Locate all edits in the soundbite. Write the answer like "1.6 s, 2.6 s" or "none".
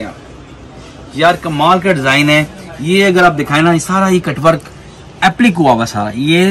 none